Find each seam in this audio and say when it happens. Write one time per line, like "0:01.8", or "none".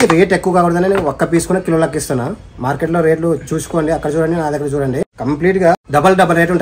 0:05.1
0:05.8